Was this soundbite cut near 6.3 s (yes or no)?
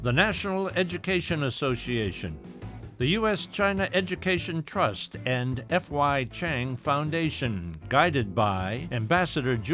no